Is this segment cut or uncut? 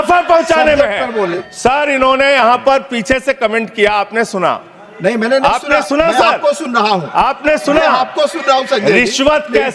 cut